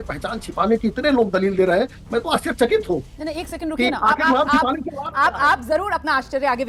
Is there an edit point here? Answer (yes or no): no